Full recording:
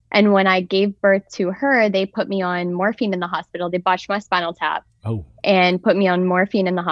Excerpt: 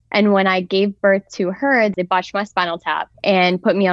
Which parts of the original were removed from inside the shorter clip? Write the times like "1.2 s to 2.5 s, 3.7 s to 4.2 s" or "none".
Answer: 1.9 s to 3.7 s, 4.9 s to 5.3 s